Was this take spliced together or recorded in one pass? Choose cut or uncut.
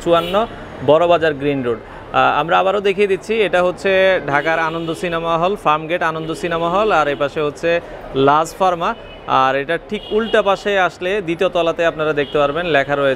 uncut